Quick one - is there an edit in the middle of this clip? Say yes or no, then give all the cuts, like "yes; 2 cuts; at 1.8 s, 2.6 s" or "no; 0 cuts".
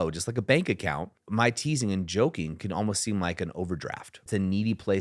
yes; 2 cuts; at 1.2 s, 4.2 s